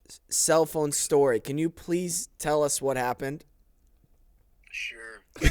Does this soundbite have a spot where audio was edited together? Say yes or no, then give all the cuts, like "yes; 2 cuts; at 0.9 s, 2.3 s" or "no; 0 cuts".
yes; 1 cut; at 3.5 s